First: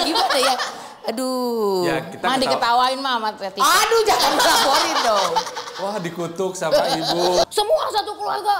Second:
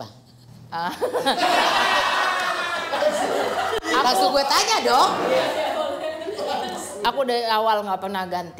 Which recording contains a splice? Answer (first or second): first